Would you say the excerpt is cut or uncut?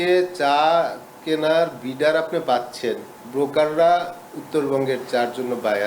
cut